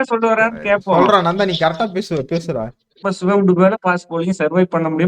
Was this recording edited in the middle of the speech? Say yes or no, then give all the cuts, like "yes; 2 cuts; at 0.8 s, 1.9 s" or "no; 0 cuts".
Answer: yes; 1 cut; at 3.1 s